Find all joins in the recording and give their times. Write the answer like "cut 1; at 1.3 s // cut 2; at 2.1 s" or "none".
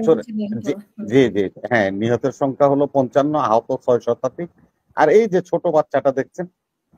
none